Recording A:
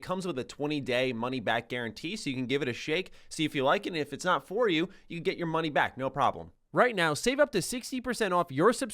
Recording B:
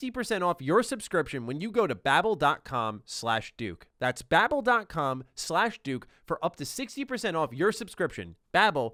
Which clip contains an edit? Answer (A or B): A